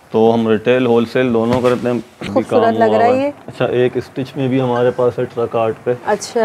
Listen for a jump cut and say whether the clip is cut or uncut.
cut